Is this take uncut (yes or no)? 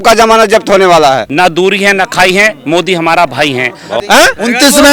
no